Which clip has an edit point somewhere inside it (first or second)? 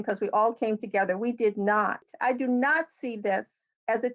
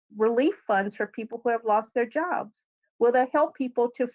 first